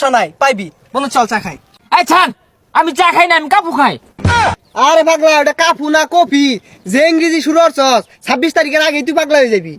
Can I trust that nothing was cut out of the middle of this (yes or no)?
no